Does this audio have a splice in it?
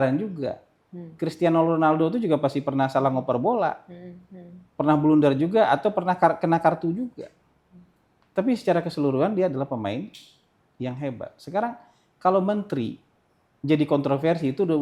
no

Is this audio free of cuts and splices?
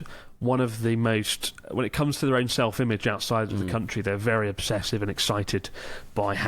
no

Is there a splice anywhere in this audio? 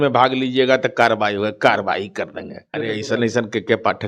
yes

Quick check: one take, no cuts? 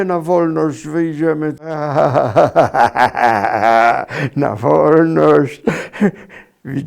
no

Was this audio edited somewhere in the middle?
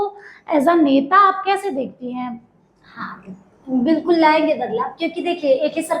no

